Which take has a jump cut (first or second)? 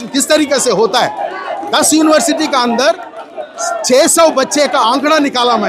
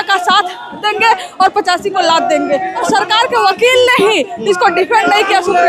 second